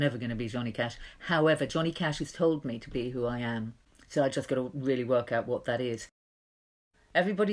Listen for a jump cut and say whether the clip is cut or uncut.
cut